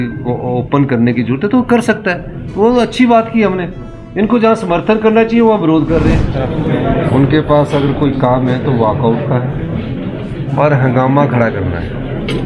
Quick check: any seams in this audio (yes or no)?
yes